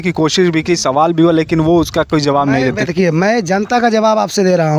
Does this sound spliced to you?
no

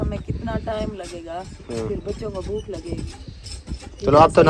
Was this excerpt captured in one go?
yes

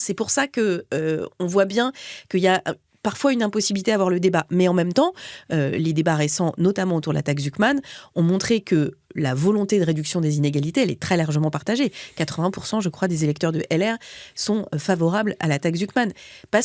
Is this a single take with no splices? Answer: yes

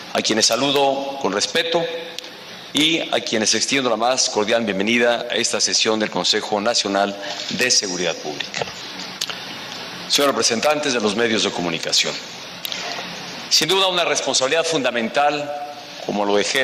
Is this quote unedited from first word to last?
yes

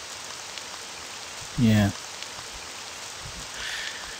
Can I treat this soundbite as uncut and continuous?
yes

